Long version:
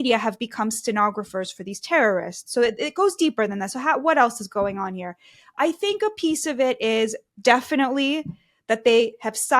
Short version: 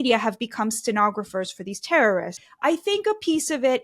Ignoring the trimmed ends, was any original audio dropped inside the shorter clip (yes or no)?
yes